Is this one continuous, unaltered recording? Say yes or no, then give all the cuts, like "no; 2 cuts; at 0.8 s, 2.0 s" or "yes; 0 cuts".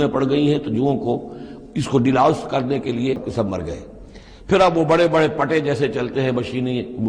no; 1 cut; at 3.2 s